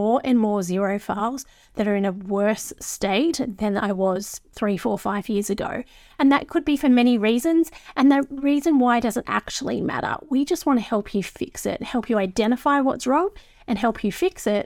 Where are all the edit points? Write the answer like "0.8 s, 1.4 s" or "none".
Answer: 4.5 s